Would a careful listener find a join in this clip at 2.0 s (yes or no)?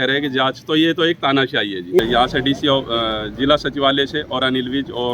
yes